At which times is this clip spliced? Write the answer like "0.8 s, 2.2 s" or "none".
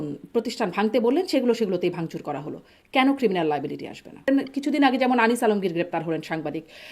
4.3 s